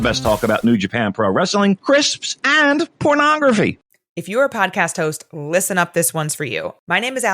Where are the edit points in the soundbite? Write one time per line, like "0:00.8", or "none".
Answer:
0:03.8